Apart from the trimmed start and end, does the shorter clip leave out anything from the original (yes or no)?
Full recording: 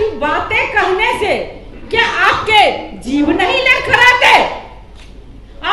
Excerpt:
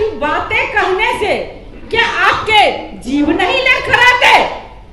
no